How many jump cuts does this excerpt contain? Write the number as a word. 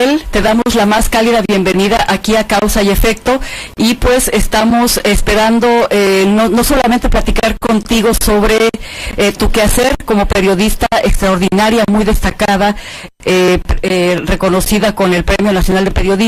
zero